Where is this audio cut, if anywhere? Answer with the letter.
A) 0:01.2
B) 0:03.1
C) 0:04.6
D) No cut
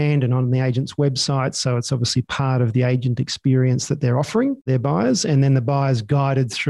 C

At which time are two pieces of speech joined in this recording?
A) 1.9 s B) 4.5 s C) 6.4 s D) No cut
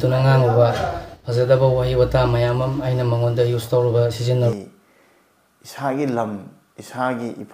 B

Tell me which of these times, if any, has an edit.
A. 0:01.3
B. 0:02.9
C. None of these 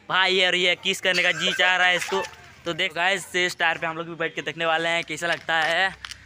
B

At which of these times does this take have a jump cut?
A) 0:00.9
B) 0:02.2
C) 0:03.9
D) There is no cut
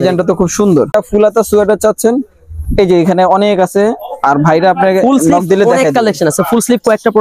A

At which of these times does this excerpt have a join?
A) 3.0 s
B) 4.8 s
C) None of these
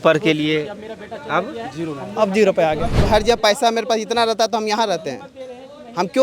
A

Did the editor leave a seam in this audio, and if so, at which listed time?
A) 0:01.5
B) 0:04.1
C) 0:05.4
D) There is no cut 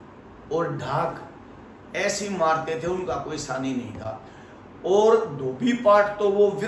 D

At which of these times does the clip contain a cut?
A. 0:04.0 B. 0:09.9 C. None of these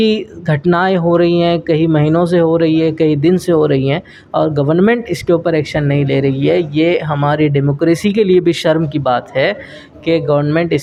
C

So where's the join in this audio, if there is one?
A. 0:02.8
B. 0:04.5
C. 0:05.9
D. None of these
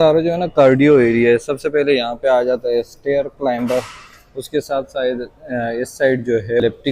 D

